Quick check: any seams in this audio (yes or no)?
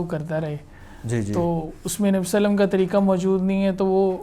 no